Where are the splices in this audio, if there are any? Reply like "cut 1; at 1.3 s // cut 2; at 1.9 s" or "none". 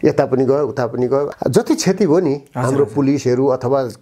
cut 1; at 1.3 s